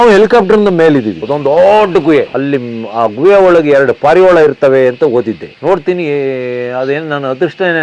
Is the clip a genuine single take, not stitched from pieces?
no; 2 cuts; at 1.2 s, 2.3 s

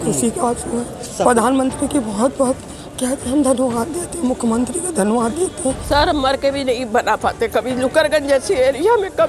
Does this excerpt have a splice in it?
yes; 1 cut; at 5.8 s

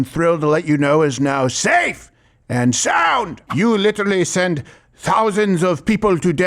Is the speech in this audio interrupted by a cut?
yes; 1 cut; at 3.4 s

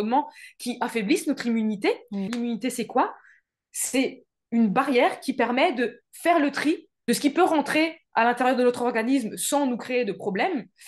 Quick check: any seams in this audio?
yes; 2 cuts; at 2.3 s, 6.9 s

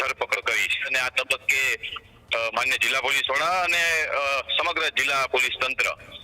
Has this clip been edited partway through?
yes; 1 cut; at 0.9 s

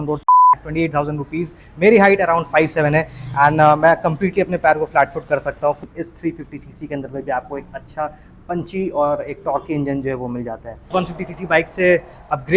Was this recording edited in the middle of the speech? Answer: yes; 3 cuts; at 1.6 s, 5.8 s, 10.9 s

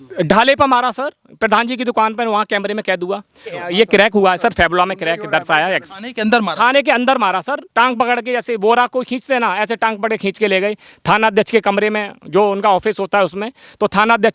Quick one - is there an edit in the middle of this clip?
yes; 3 cuts; at 3.5 s, 5.9 s, 7.6 s

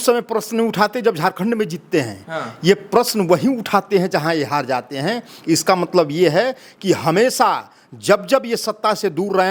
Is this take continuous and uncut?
yes; 0 cuts

